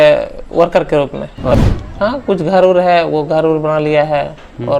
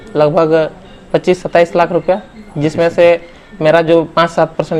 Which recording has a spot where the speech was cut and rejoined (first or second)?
first